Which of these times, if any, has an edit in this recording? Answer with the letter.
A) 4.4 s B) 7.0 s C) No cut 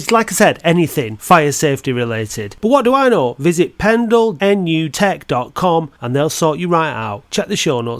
A